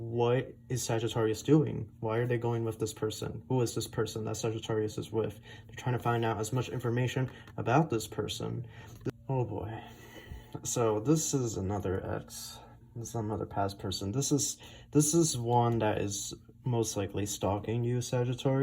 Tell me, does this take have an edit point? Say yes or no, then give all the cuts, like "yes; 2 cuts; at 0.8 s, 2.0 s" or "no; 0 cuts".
yes; 1 cut; at 9.0 s